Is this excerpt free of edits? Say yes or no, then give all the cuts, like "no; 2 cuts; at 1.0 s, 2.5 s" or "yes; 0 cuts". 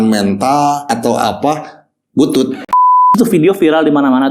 no; 2 cuts; at 0.9 s, 2.9 s